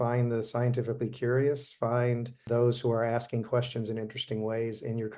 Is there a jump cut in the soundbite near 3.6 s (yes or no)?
no